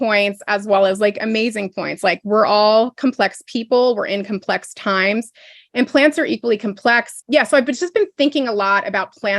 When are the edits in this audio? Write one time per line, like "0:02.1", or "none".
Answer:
0:07.1